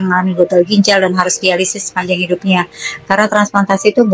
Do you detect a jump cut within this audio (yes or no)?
no